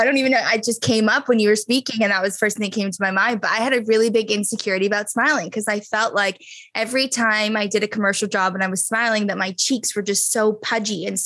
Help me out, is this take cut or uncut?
uncut